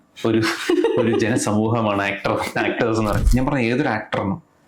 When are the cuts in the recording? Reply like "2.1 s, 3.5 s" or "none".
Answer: 3.2 s